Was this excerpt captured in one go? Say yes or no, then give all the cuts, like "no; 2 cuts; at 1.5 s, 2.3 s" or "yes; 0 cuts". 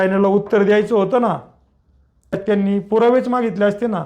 no; 1 cut; at 2.4 s